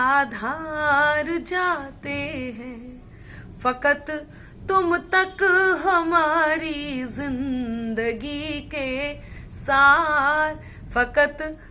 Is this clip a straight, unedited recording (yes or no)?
yes